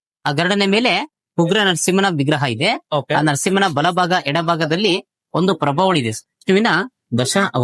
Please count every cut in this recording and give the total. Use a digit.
1